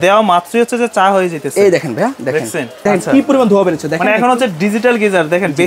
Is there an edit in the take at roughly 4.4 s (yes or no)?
no